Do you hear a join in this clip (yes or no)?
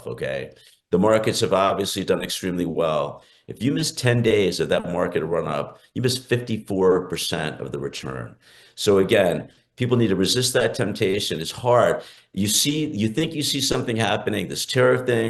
no